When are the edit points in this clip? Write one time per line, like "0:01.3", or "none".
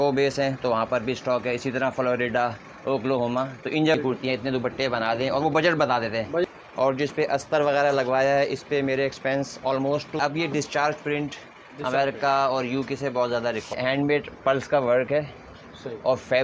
0:04.0
0:06.5
0:10.2
0:13.8